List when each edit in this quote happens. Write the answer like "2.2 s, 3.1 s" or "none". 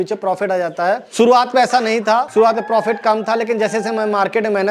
1.1 s, 2.3 s

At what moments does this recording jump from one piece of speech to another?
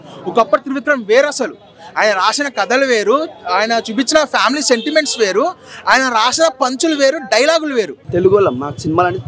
8.0 s

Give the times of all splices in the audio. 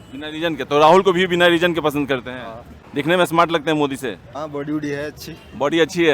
2.8 s, 4.2 s

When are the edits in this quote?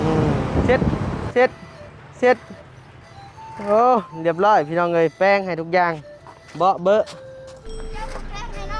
none

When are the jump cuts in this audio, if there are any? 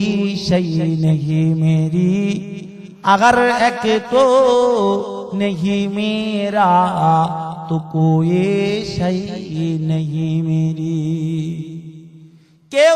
none

